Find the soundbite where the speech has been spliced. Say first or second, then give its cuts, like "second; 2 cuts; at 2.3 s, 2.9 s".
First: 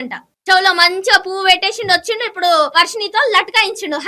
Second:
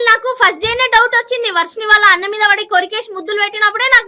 first; 1 cut; at 2.7 s